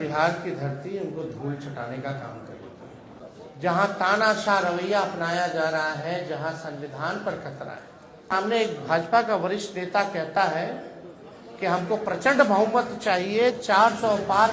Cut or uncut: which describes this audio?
cut